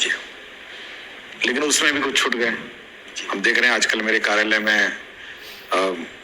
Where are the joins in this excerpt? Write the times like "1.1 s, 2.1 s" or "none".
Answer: 3.6 s